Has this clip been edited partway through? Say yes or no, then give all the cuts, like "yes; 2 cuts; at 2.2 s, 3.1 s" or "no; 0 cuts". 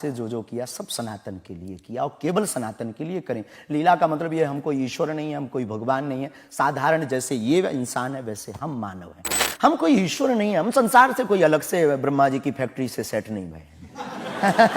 yes; 1 cut; at 9.5 s